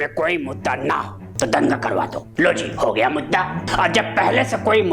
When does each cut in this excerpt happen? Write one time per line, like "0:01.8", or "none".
0:01.2
0:02.2
0:03.6